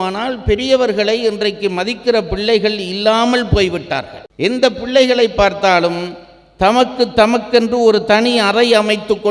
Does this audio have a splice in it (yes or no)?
no